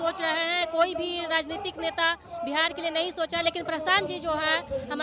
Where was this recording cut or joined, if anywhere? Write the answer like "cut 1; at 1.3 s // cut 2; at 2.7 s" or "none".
none